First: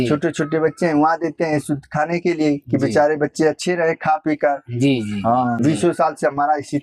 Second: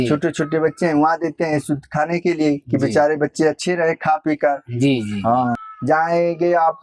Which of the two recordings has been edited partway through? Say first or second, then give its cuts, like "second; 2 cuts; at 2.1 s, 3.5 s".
second; 1 cut; at 5.6 s